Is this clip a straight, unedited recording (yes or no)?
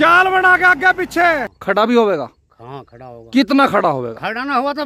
no